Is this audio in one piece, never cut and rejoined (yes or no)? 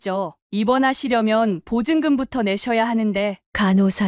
yes